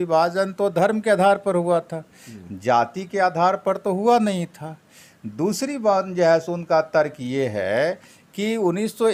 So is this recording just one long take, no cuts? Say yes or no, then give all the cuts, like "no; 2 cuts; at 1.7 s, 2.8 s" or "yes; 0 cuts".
yes; 0 cuts